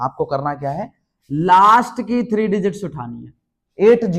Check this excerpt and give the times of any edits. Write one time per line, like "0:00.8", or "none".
none